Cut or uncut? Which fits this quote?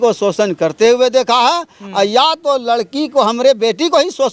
uncut